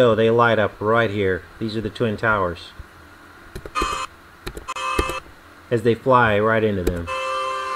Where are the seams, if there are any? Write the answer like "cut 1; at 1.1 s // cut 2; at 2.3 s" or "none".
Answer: none

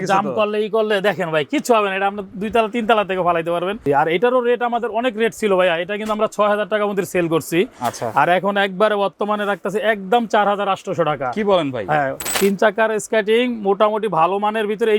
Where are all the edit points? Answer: cut 1; at 3.8 s // cut 2; at 12.4 s

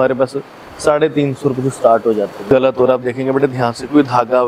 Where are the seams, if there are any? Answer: cut 1; at 2.4 s

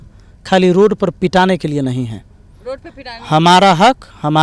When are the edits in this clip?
none

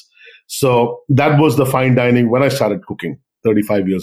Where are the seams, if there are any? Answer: none

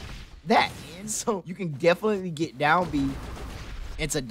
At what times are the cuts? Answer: cut 1; at 1.5 s

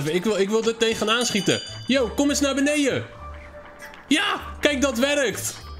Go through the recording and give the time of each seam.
none

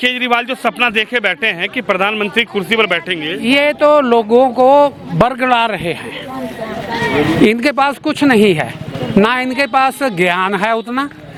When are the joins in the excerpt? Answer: none

